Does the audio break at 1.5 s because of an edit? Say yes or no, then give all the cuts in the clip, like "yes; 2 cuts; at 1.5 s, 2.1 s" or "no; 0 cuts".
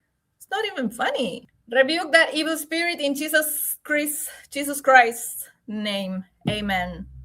yes; 1 cut; at 1.5 s